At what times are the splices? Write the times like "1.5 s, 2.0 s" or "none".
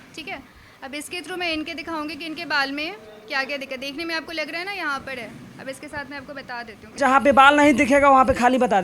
7.0 s